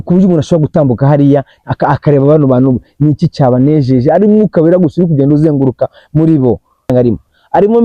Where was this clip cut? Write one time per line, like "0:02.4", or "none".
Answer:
0:06.9